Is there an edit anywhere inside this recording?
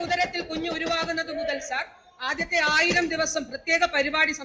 no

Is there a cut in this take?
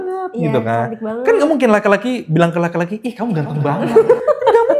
no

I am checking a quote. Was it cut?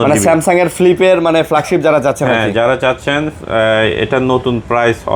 no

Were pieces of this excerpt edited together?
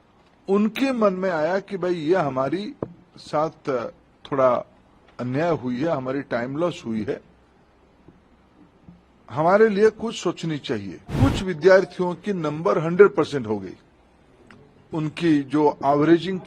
yes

